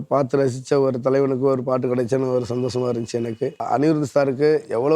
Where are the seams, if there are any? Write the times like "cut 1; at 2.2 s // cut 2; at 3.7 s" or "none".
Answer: cut 1; at 3.6 s